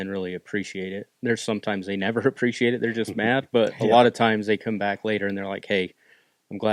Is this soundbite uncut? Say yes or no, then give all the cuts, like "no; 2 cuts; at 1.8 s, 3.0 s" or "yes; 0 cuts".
yes; 0 cuts